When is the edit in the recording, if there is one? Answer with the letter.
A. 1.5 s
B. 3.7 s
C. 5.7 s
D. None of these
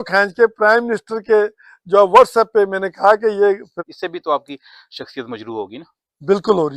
B